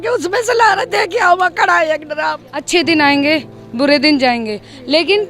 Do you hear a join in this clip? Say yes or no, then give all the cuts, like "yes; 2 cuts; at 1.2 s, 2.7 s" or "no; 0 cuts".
yes; 1 cut; at 2.5 s